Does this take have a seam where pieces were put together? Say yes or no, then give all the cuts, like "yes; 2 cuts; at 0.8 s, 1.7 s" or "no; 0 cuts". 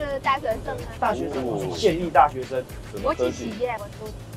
no; 0 cuts